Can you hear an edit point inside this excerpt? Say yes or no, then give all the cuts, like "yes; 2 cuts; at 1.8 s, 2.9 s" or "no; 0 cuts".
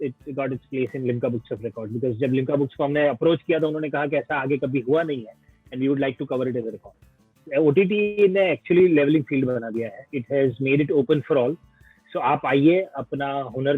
yes; 1 cut; at 7.4 s